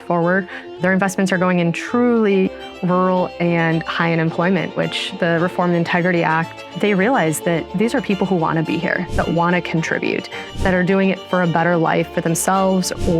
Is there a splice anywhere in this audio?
yes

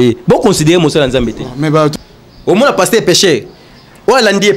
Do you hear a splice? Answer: yes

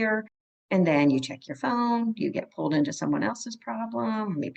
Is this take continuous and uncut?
yes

